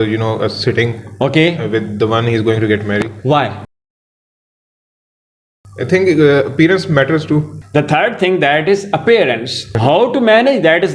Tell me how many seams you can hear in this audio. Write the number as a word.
zero